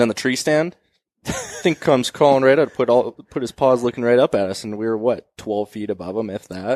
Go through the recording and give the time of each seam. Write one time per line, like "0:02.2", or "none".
none